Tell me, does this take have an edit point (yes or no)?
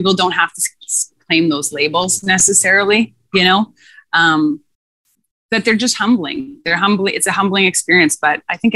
no